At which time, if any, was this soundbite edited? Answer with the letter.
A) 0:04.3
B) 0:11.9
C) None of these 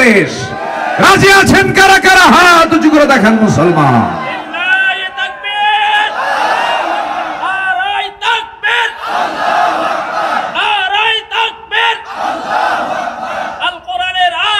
C